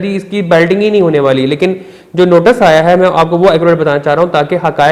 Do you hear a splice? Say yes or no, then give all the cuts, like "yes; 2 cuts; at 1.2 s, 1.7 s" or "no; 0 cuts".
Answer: no; 0 cuts